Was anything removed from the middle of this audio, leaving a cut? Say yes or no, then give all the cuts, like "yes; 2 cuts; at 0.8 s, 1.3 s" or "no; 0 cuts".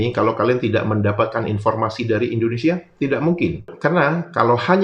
no; 0 cuts